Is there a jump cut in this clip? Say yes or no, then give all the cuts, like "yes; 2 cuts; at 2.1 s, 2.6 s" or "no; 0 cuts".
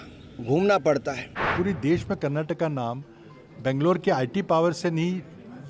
yes; 1 cut; at 1.4 s